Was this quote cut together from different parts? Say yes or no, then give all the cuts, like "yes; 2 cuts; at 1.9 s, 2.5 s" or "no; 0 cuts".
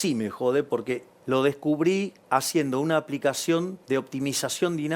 yes; 3 cuts; at 1.1 s, 2.2 s, 3.8 s